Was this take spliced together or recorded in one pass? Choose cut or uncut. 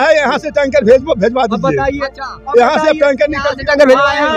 uncut